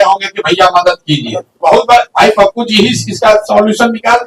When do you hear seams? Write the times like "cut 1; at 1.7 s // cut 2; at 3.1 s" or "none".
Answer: cut 1; at 1.6 s